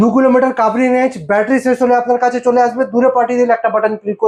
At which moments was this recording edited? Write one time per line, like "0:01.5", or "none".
none

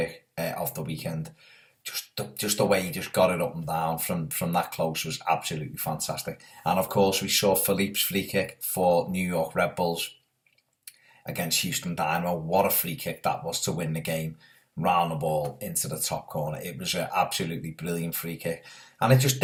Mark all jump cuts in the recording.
none

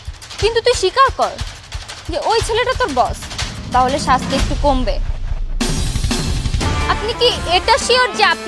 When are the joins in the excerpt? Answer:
0:06.8

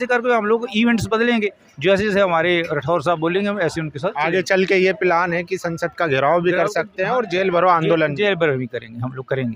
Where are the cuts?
none

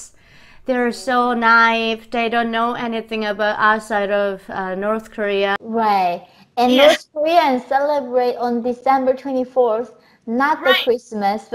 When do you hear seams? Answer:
0:05.6

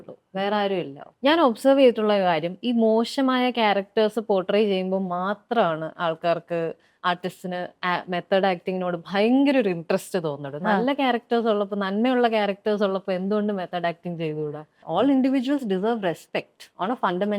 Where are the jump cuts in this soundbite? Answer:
0:01.0
0:14.8

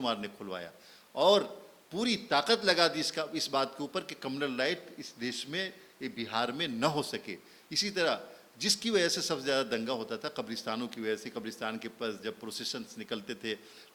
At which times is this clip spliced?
none

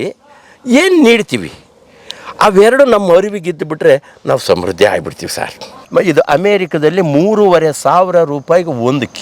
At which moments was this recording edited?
0:05.8

